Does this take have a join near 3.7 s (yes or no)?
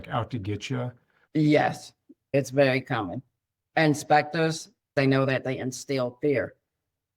no